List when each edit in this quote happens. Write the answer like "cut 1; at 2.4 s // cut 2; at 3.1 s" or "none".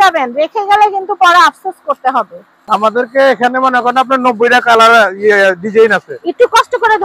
cut 1; at 2.5 s